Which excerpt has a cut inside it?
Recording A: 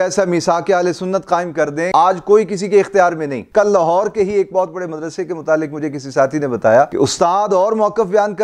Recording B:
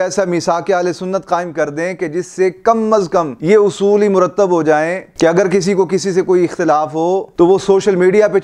A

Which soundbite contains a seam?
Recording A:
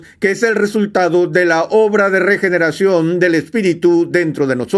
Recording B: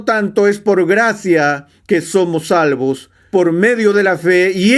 B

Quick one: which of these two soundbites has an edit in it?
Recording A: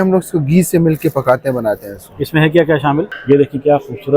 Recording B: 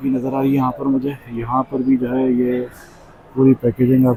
A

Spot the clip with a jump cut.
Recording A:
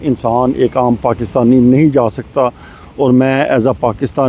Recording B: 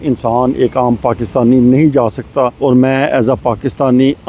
B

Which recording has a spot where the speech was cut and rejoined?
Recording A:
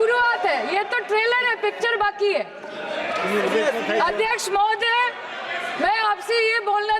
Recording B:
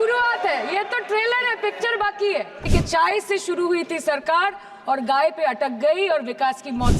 B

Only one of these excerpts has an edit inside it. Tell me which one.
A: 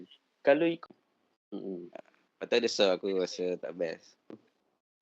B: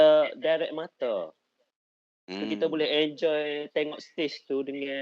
A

